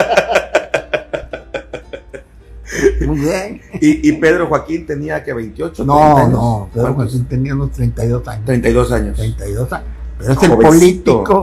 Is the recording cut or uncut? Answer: uncut